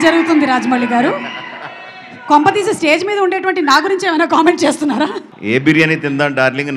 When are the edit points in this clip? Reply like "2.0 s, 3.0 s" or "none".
5.3 s

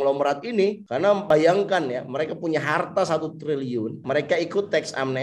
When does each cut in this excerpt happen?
1.2 s, 4.0 s

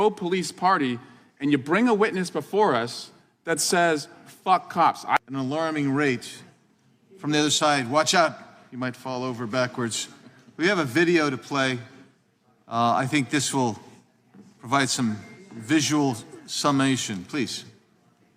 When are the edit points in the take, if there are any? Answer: 5.2 s

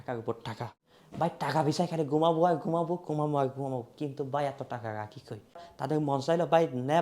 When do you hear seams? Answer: 5.7 s

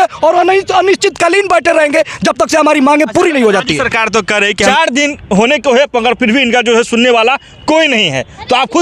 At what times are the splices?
4.7 s

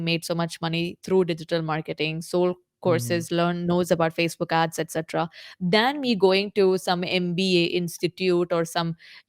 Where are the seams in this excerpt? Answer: 5.4 s

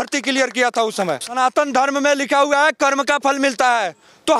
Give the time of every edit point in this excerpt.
1.3 s

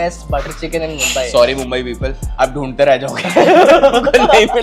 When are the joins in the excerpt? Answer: none

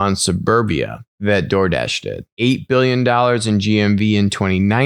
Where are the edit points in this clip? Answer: 1.0 s, 2.2 s

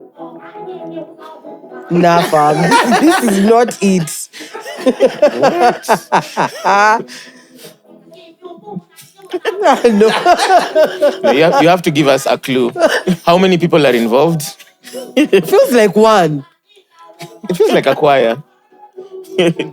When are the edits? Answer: none

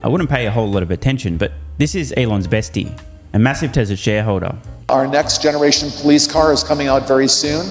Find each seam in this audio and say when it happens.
4.8 s

